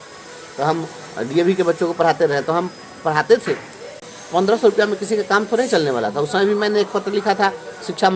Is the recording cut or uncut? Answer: cut